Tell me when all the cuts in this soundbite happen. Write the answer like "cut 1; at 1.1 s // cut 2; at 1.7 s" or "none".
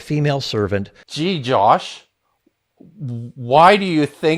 cut 1; at 1.0 s